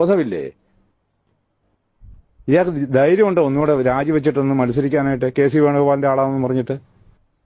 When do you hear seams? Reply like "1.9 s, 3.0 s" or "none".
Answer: none